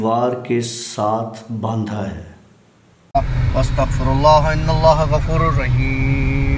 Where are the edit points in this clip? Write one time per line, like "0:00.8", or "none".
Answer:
0:03.1